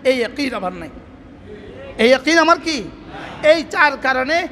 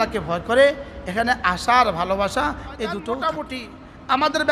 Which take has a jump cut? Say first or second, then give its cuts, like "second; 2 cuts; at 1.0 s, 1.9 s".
second; 1 cut; at 3.3 s